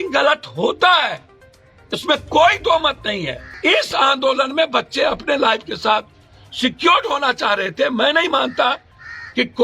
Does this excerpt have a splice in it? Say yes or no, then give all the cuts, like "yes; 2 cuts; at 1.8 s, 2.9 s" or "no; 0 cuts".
yes; 1 cut; at 3.5 s